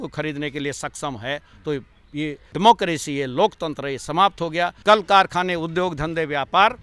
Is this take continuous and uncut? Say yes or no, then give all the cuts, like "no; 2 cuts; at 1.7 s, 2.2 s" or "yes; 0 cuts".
no; 2 cuts; at 2.5 s, 4.8 s